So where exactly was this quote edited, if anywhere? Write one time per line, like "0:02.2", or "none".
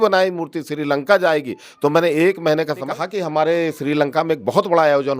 0:02.9